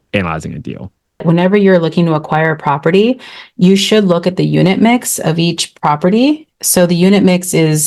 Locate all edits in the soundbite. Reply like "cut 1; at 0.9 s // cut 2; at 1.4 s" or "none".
cut 1; at 1.2 s